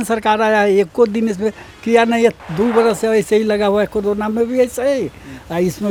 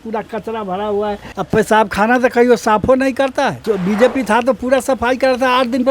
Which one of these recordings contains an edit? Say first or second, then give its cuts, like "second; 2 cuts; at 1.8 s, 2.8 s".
second; 2 cuts; at 1.3 s, 3.6 s